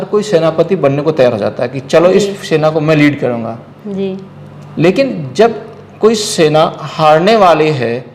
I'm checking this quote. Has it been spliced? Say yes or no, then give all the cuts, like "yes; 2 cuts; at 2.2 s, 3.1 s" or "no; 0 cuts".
no; 0 cuts